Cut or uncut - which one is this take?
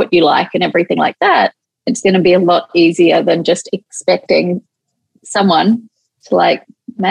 uncut